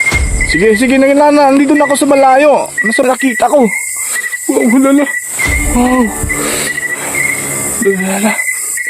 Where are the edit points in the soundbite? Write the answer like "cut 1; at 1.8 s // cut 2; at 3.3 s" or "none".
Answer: cut 1; at 3.0 s